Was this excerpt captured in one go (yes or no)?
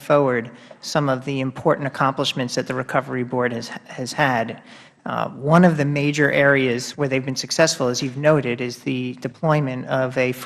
yes